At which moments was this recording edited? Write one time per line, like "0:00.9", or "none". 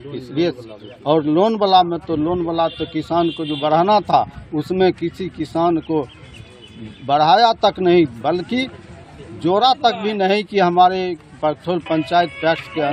none